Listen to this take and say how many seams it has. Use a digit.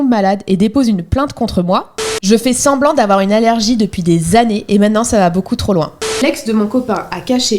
2